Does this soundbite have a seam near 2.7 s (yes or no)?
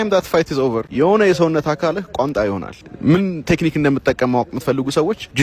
yes